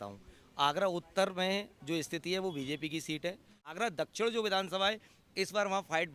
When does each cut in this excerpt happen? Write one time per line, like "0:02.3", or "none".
0:03.7